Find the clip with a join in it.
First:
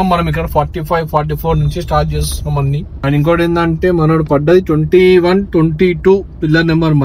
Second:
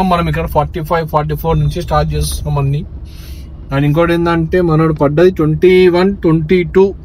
first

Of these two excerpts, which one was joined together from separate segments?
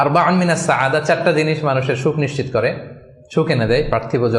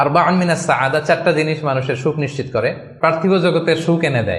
second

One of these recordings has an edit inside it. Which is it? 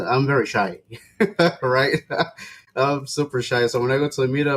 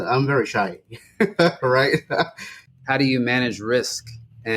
second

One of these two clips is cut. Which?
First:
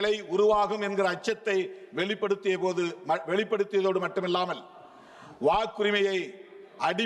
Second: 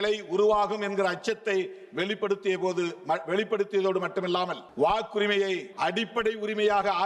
second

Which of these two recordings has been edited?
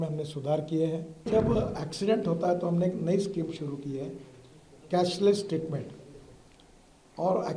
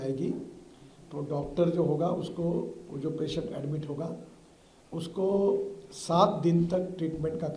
first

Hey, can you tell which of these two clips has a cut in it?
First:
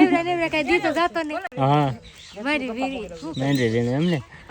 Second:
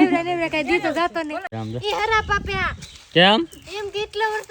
second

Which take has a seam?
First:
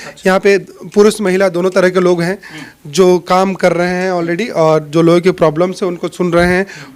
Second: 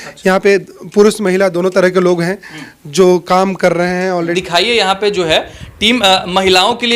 second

